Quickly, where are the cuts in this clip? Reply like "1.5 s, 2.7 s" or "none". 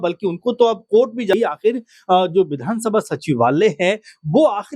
1.3 s